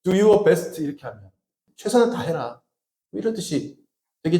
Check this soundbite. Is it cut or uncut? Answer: cut